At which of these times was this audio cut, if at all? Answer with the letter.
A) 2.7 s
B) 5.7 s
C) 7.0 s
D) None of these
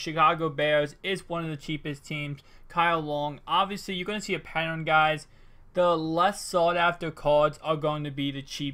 B